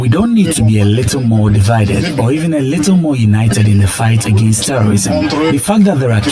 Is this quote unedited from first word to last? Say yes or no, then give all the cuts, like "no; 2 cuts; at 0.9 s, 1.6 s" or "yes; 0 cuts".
yes; 0 cuts